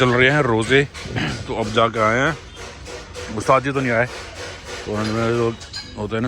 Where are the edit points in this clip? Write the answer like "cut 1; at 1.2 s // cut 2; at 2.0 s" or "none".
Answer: none